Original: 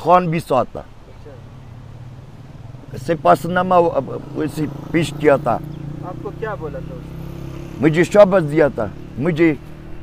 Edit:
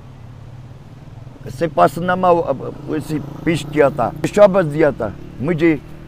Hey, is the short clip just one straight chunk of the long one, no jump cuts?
no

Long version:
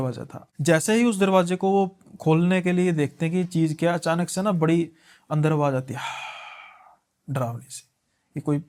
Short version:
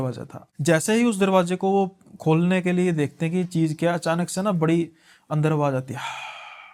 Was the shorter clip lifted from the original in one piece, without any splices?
yes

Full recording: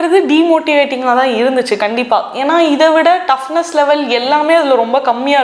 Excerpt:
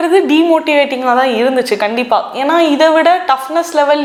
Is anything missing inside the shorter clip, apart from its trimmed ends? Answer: no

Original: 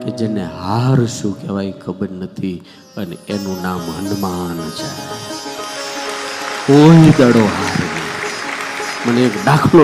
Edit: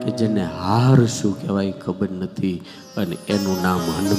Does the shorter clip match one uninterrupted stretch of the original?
yes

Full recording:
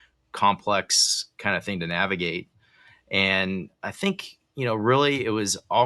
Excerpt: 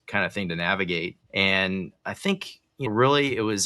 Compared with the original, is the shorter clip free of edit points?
no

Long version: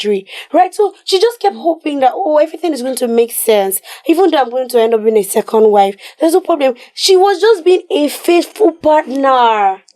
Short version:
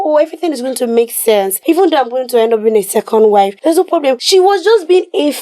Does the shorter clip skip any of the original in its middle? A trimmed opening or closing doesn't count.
yes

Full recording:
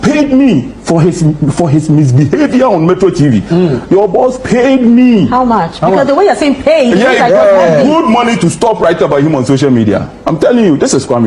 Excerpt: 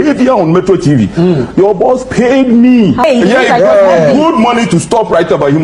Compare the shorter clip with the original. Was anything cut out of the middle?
yes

